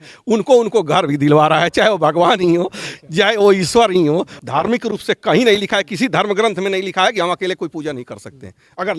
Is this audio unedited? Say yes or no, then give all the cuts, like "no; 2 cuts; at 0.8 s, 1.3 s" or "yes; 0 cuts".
no; 1 cut; at 4.3 s